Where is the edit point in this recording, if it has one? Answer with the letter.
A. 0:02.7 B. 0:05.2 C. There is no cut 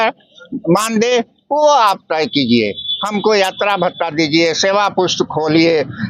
C